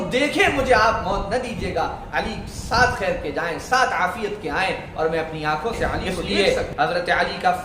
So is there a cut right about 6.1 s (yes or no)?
yes